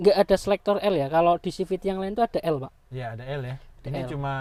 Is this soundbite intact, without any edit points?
yes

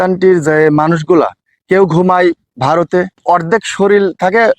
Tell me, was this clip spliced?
yes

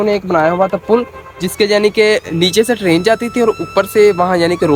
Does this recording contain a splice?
no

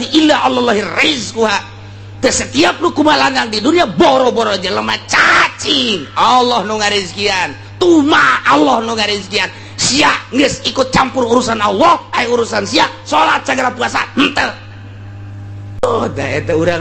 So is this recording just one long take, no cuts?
no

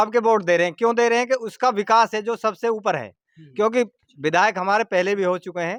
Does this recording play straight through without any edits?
yes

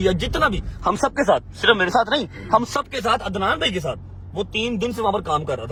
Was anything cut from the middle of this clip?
no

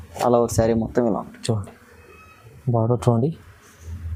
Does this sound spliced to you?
no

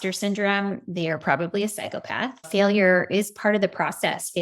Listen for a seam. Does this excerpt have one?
yes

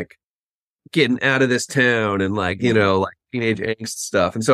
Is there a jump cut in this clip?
no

